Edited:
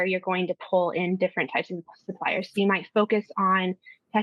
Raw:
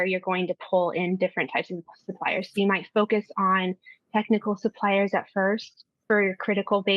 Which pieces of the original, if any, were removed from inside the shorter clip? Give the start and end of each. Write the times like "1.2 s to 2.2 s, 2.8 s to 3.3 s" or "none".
none